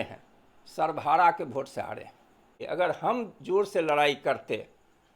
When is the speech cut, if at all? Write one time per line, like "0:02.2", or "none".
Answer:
0:02.5